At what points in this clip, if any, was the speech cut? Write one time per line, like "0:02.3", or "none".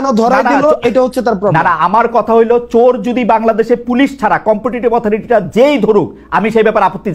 none